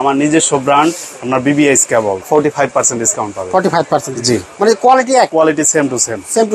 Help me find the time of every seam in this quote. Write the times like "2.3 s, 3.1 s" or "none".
2.3 s, 5.3 s